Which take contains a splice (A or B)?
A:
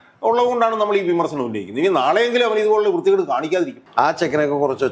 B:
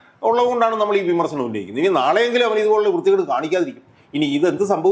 A